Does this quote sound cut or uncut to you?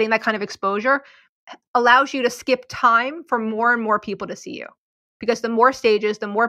cut